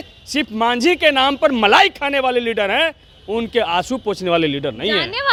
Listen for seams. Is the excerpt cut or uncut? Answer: uncut